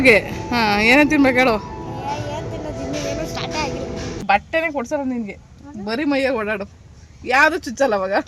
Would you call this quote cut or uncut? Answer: cut